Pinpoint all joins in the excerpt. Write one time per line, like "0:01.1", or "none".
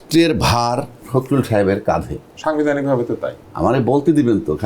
0:01.1
0:03.4